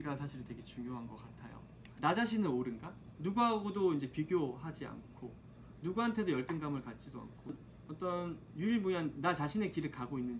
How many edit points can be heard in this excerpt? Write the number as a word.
two